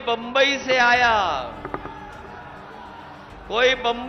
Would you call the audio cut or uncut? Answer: uncut